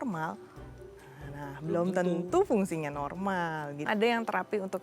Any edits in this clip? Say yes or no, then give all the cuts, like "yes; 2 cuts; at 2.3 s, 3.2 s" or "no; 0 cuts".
yes; 1 cut; at 3.9 s